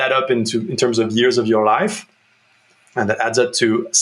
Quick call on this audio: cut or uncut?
uncut